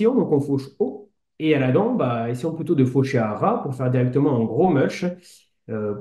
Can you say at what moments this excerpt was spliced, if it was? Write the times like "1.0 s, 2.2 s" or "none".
none